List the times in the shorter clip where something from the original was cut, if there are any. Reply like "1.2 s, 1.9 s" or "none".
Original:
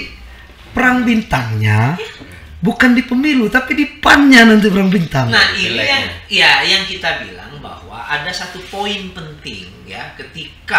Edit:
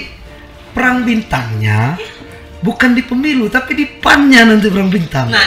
none